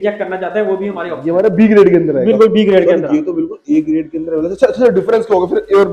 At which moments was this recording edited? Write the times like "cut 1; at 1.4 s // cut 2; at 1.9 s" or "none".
cut 1; at 1.1 s